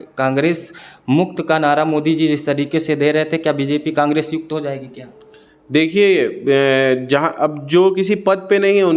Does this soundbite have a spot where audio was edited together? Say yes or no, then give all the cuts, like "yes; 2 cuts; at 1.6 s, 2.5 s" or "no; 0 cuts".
no; 0 cuts